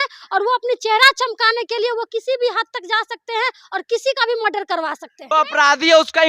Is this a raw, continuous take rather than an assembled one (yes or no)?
no